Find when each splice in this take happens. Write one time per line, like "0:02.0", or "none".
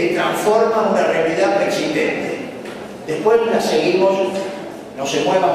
0:01.7